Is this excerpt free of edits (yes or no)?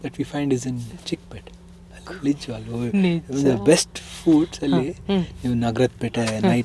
yes